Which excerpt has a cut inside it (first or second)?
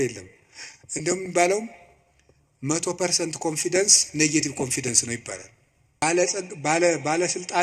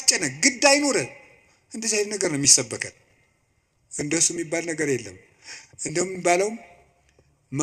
first